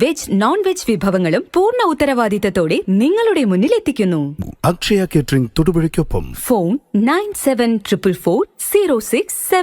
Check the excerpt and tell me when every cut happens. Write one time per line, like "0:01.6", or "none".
0:04.4

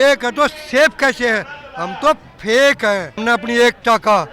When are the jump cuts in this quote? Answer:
0:03.1

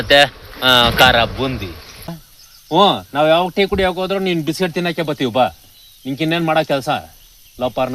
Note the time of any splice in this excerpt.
0:02.1

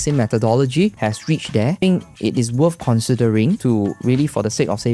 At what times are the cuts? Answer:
0:01.3
0:03.6

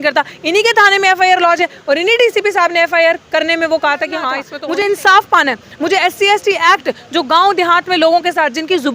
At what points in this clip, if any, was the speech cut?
0:04.5

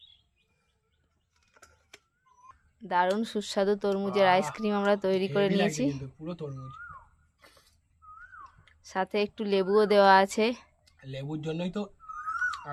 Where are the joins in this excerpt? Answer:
none

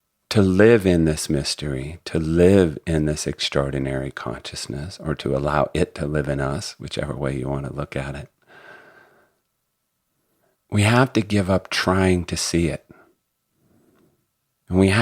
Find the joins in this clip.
none

